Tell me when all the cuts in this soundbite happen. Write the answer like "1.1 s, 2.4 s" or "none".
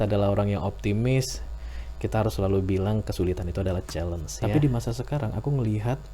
4.3 s